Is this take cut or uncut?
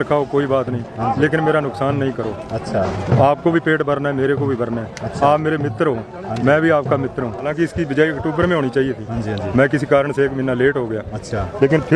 cut